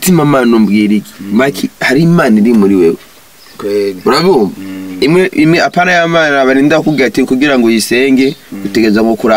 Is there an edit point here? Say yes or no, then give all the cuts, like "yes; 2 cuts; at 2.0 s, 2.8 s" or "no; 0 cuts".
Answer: no; 0 cuts